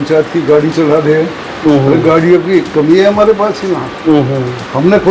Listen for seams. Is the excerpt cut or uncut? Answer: uncut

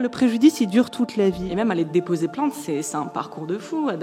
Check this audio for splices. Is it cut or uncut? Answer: cut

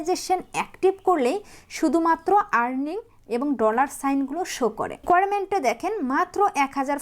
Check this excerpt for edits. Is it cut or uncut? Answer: cut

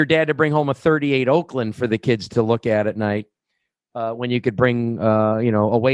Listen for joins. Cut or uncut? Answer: uncut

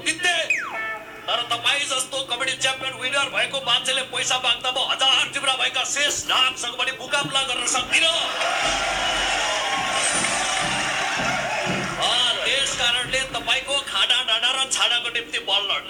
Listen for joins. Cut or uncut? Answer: uncut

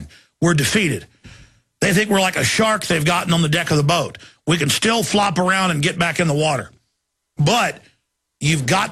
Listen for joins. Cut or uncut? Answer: cut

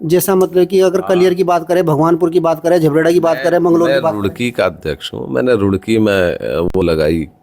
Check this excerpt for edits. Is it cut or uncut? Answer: uncut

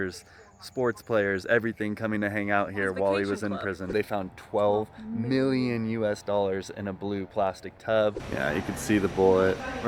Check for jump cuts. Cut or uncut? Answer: cut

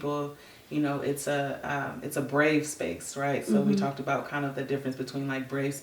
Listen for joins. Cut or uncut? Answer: uncut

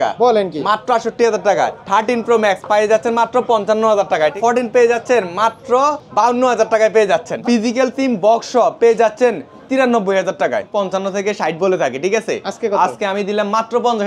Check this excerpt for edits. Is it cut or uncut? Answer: cut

